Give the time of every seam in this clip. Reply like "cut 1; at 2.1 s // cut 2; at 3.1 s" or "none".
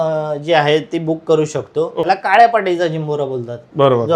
cut 1; at 2.0 s

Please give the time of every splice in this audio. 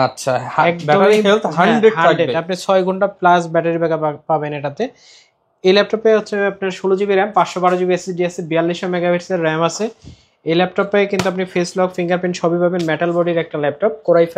none

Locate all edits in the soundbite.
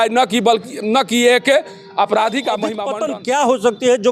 cut 1; at 2.8 s

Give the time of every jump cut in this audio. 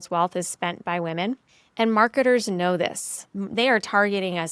cut 1; at 1.6 s // cut 2; at 3.4 s

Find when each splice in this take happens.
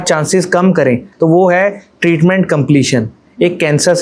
none

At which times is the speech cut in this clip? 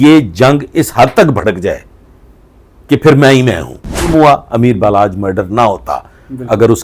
cut 1; at 4.1 s

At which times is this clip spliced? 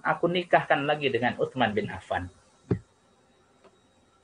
none

